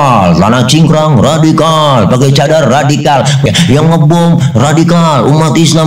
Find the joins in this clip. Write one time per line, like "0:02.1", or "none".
0:03.5

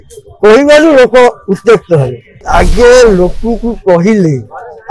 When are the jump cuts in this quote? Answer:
0:02.4

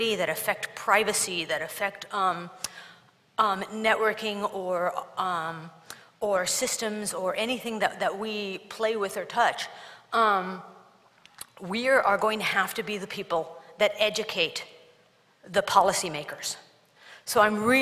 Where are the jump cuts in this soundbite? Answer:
0:06.5

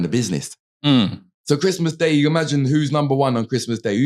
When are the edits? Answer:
0:01.3

